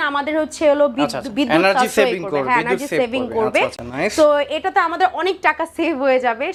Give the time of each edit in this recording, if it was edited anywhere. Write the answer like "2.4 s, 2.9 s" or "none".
none